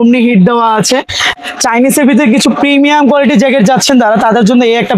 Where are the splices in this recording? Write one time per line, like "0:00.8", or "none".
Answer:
0:01.2

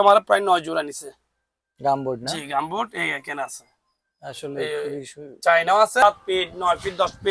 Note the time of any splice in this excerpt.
0:06.0

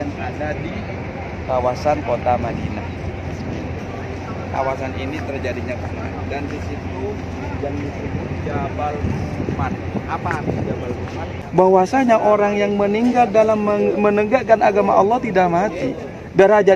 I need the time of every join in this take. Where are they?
0:11.4

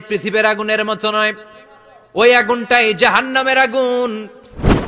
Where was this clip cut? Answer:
none

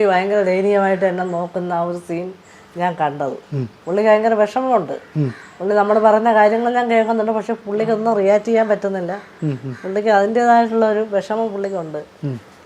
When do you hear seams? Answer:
none

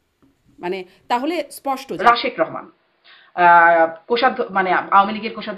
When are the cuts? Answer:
0:02.0

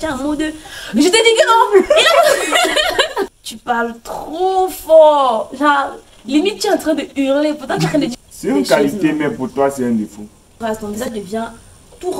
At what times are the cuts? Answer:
0:03.3
0:08.1
0:10.6

